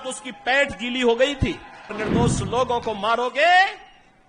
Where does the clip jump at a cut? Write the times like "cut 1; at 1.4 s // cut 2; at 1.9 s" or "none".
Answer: cut 1; at 1.9 s